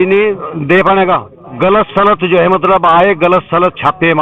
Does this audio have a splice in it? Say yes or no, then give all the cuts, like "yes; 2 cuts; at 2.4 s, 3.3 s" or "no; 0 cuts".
yes; 1 cut; at 1.4 s